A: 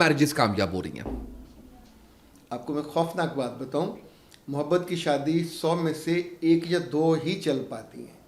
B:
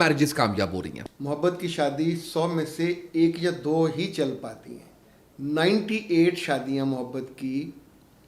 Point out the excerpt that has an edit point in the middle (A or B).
B